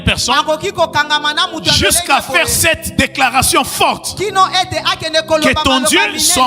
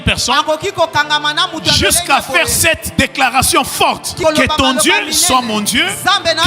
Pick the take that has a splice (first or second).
second